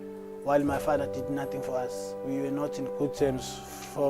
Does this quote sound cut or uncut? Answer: cut